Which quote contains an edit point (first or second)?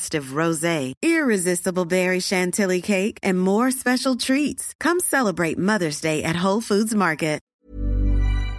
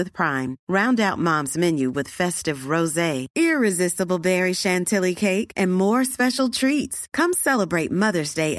first